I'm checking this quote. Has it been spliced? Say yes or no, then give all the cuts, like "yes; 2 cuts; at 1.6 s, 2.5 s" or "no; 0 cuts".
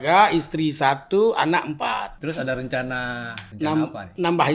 yes; 2 cuts; at 2.1 s, 3.4 s